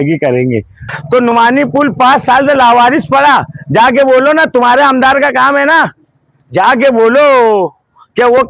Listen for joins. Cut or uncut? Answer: cut